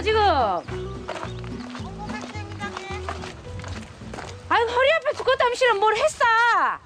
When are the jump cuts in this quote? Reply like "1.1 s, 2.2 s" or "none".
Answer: none

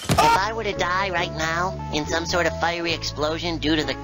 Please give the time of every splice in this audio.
none

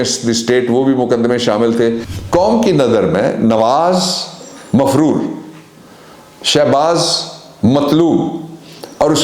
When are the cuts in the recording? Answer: 2.1 s

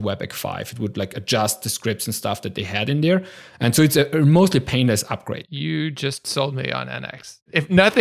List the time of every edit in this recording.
none

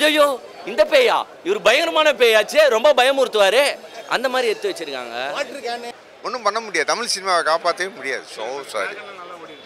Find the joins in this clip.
5.9 s

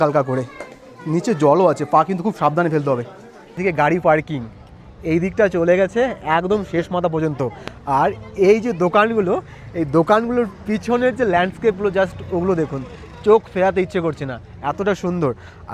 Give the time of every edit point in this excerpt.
3.6 s

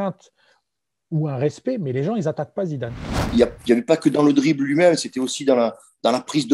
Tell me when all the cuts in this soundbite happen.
3.3 s

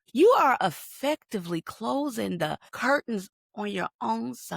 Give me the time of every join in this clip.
2.7 s, 3.4 s

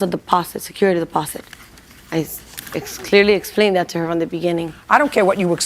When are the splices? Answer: 4.7 s

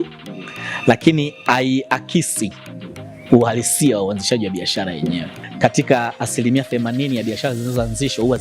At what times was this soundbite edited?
5.4 s

